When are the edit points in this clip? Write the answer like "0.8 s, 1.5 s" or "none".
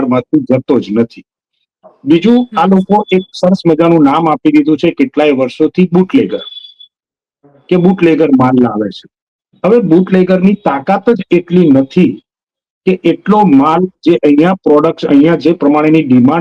none